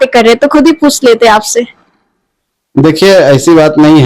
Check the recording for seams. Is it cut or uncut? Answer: uncut